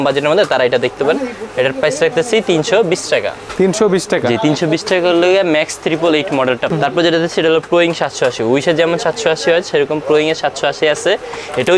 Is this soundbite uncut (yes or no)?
yes